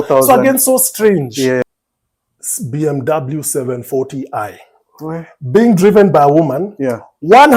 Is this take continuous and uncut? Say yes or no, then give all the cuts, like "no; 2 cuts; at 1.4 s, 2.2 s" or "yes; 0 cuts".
no; 1 cut; at 1.6 s